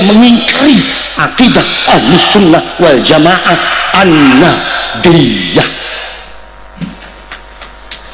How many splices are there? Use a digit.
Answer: 0